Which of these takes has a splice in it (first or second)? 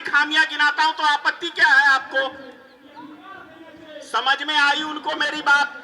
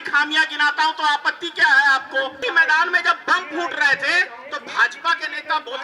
second